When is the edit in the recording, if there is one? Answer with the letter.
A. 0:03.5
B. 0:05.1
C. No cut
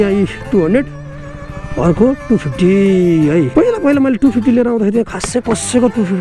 A